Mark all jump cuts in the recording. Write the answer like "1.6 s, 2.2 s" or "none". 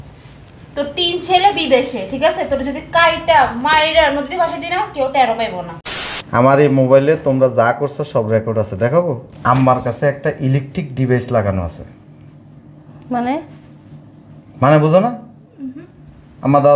5.8 s, 9.3 s